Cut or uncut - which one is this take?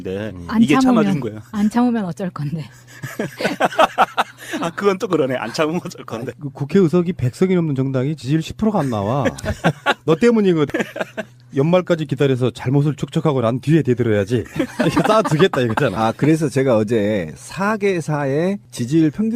uncut